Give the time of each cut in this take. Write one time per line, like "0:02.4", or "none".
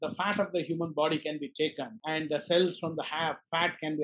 0:01.9